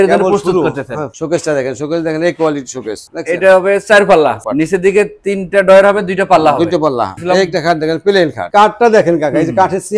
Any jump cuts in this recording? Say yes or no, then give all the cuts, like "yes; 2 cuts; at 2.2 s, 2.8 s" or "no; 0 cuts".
yes; 5 cuts; at 1.1 s, 3.0 s, 4.4 s, 7.1 s, 8.4 s